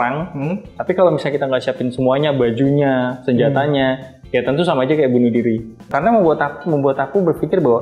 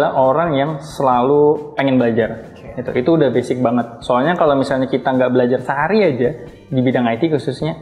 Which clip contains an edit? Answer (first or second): first